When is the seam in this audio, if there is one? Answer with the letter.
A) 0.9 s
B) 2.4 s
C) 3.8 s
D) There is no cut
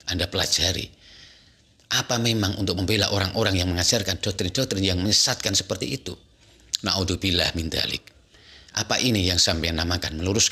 D